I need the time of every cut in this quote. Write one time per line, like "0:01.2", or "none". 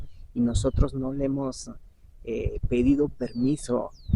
none